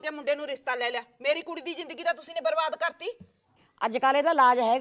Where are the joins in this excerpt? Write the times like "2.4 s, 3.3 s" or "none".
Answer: 3.6 s